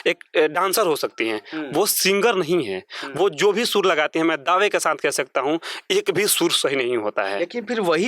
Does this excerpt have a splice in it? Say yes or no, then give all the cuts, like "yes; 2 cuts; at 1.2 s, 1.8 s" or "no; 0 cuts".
no; 0 cuts